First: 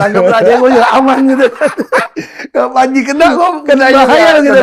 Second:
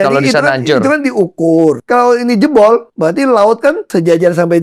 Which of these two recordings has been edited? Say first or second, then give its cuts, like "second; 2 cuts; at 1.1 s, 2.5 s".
second; 3 cuts; at 1.8 s, 2.9 s, 3.8 s